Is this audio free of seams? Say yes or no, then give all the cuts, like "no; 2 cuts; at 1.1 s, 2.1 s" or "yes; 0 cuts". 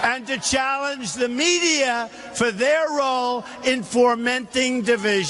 no; 1 cut; at 4.1 s